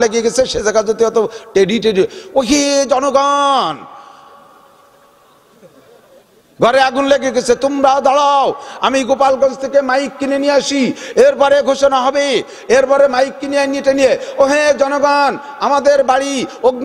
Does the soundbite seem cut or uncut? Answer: uncut